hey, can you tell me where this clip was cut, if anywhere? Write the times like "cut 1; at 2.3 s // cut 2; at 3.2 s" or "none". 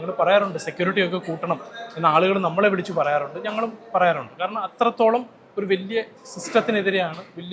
none